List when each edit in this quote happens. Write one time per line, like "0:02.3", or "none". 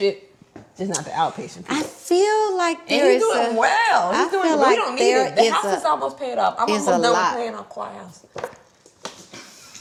none